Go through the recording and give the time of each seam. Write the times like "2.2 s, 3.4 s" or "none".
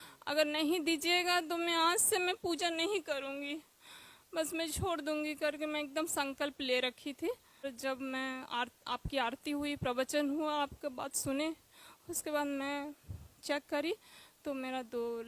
7.6 s